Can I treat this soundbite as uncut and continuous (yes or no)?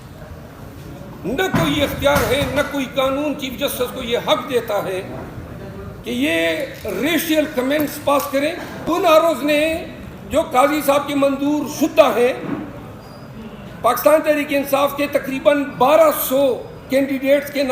no